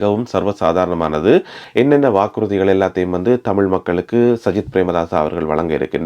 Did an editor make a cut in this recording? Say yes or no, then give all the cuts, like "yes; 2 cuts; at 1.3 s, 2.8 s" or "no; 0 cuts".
yes; 1 cut; at 1.6 s